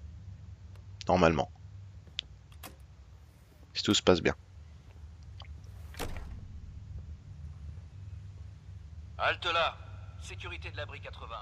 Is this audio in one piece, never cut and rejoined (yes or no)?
no